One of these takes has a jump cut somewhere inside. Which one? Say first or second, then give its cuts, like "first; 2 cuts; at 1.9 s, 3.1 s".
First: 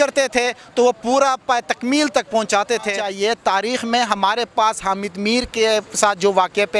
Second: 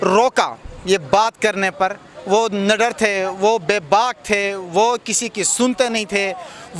first; 1 cut; at 3.0 s